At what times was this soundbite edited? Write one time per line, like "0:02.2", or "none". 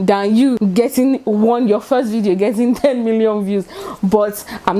none